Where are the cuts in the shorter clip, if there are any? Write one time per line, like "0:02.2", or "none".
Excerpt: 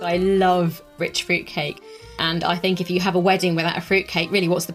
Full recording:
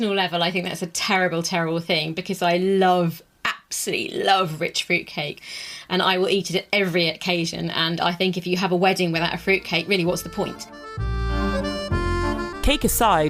0:00.9
0:02.2